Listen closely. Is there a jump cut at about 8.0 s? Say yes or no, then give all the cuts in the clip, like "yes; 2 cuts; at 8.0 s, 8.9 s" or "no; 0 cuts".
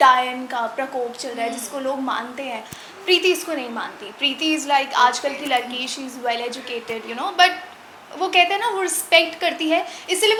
no; 0 cuts